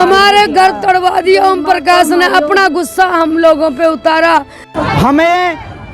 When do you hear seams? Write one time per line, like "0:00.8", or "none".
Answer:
0:04.7